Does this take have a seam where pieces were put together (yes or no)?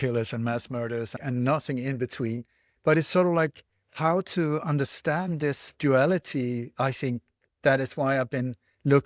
yes